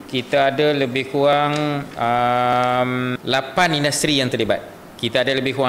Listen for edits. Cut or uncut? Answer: cut